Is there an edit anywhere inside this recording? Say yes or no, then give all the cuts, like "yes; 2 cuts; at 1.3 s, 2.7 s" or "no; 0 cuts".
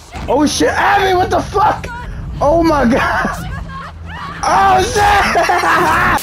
no; 0 cuts